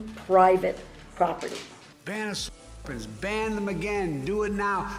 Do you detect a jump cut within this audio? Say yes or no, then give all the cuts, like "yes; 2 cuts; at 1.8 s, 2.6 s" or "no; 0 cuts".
yes; 1 cut; at 1.9 s